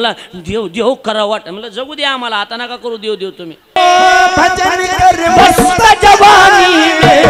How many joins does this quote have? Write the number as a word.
one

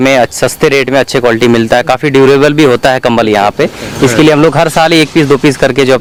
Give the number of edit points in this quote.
zero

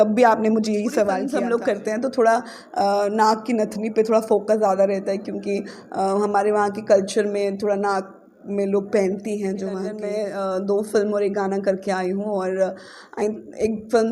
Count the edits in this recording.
two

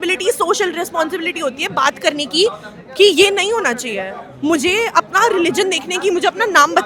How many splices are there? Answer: zero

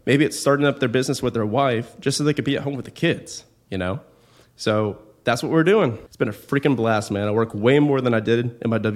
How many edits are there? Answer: one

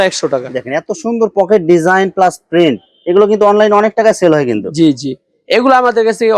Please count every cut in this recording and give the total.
zero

